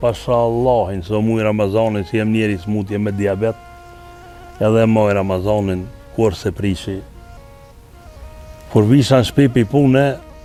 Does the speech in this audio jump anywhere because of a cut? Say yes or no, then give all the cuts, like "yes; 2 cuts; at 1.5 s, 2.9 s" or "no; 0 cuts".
no; 0 cuts